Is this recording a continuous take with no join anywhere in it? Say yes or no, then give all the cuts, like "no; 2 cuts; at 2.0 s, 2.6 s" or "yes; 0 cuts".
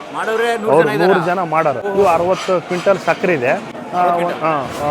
no; 2 cuts; at 1.8 s, 3.8 s